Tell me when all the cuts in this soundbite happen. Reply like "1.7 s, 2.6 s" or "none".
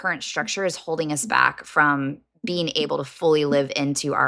none